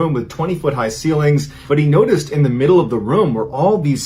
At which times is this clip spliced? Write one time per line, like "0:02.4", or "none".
0:01.6